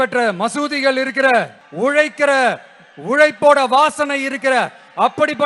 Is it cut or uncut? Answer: cut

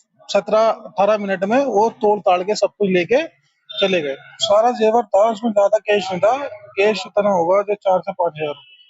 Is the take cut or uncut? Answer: cut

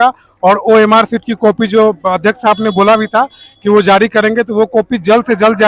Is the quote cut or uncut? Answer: uncut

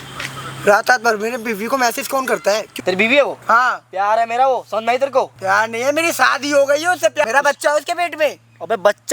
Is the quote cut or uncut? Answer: cut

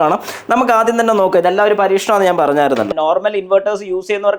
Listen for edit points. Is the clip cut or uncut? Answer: cut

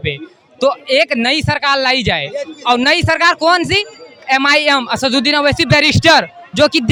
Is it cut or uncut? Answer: uncut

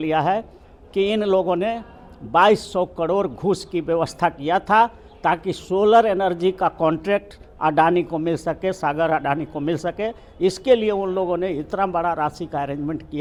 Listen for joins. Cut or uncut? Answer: uncut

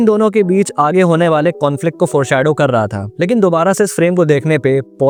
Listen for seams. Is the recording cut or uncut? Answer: uncut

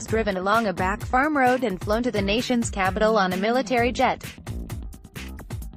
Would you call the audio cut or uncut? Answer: cut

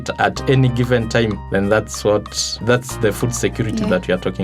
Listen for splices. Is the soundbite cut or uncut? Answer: cut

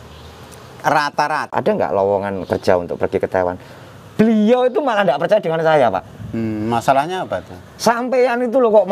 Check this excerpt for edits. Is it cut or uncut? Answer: cut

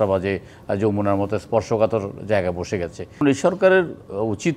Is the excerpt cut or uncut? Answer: cut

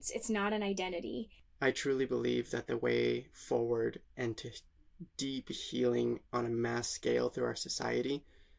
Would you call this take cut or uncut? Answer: cut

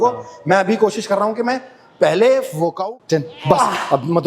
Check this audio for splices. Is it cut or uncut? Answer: cut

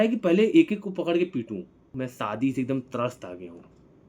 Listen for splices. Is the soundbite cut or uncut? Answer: cut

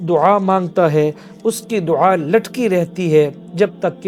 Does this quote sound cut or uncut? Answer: uncut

